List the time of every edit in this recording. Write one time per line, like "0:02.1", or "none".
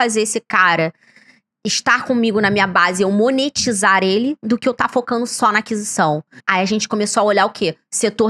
0:06.4